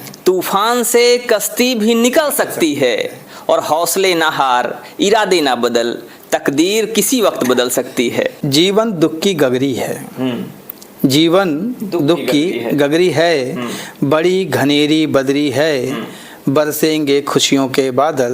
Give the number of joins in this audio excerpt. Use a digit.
1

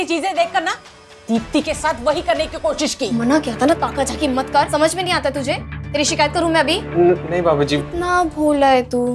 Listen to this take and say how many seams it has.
3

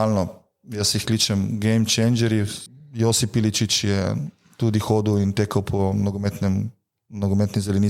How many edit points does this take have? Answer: 1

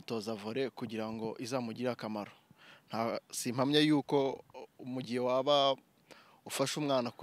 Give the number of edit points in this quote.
0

